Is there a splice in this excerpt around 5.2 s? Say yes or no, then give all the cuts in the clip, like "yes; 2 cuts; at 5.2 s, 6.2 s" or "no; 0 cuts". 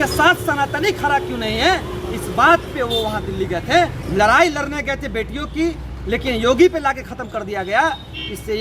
no; 1 cut; at 4.0 s